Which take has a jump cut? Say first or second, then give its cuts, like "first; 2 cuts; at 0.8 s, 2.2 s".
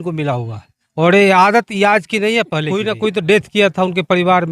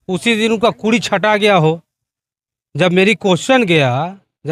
first; 1 cut; at 2.8 s